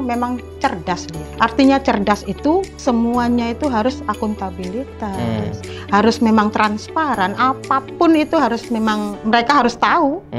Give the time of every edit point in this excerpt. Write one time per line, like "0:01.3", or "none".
0:01.2
0:02.8
0:09.1

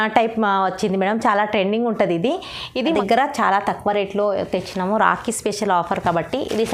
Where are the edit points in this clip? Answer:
0:02.9

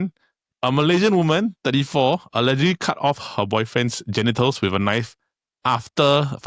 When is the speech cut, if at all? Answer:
none

